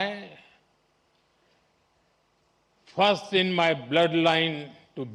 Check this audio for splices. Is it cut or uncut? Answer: uncut